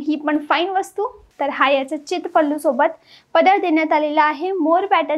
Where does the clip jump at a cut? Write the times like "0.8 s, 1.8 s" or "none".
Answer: 1.2 s